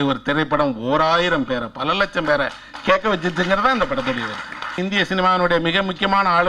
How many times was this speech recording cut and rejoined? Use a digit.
1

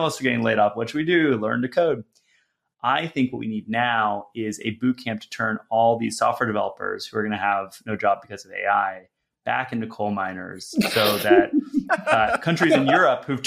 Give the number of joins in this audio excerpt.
0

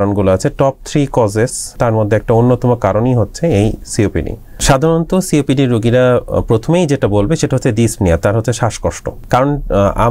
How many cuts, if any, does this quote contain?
3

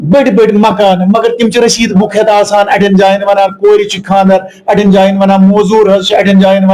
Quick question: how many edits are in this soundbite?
0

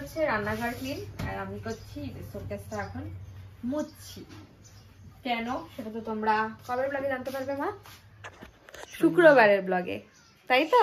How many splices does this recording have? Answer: 0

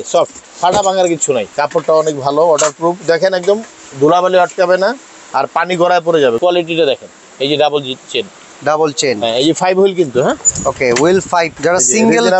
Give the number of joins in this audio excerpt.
3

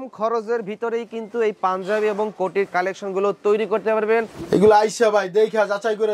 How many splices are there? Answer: 1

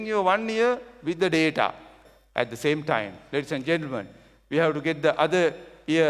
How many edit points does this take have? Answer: 1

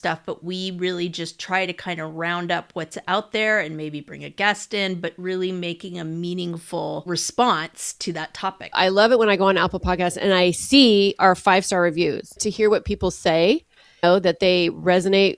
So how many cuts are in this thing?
3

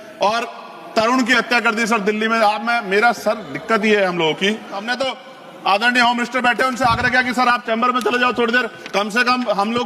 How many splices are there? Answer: 1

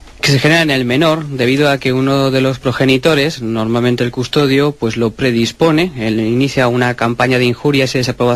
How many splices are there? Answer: 0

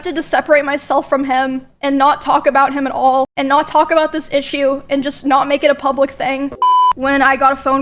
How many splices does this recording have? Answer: 1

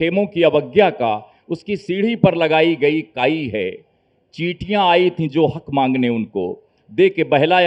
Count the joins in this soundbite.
0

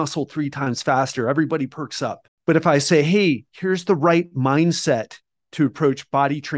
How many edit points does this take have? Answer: 1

